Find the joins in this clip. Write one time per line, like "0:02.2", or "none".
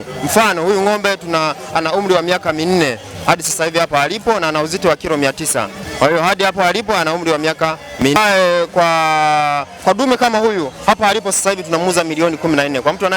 0:08.1